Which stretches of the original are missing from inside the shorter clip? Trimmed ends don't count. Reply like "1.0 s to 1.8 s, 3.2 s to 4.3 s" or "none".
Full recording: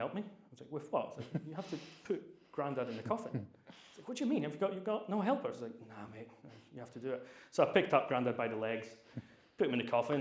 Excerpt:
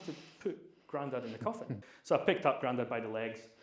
3.6 s to 7.4 s